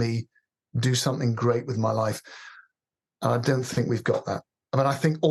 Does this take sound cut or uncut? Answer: uncut